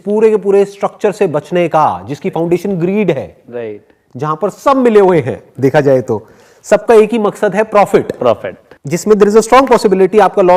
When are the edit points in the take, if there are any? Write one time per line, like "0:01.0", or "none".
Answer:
0:08.2